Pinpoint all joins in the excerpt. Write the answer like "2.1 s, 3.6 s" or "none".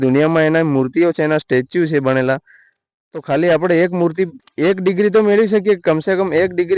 4.4 s